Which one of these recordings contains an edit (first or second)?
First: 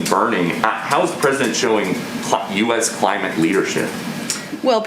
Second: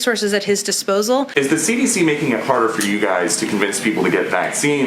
second